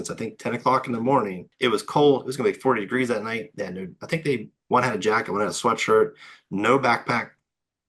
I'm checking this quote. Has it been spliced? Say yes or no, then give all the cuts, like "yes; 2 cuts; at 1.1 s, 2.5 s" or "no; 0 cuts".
yes; 1 cut; at 1.4 s